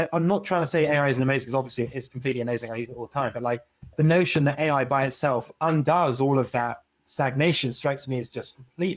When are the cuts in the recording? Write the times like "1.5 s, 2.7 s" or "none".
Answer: none